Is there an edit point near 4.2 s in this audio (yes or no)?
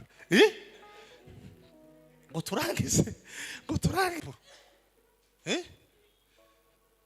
yes